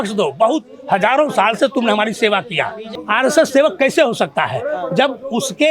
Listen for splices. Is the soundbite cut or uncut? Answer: cut